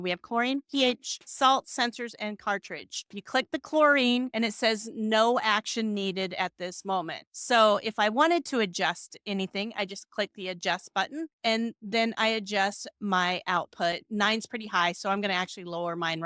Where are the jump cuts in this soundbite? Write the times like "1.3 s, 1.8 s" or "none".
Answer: none